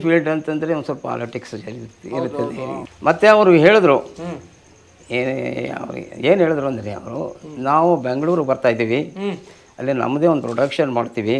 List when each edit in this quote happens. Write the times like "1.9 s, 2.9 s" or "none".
2.9 s